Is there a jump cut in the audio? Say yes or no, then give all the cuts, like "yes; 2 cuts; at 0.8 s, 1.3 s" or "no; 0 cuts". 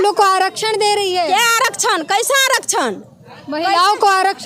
no; 0 cuts